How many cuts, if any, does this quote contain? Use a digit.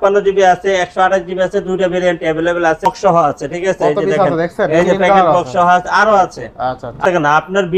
2